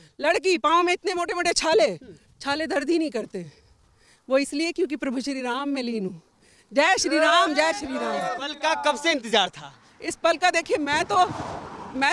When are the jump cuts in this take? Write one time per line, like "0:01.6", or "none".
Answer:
none